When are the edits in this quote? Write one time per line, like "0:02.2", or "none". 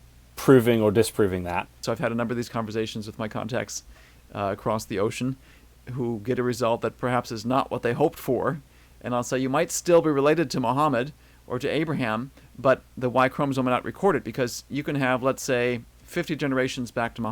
0:01.8